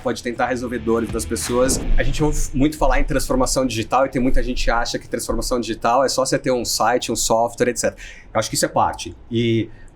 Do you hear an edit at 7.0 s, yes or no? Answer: no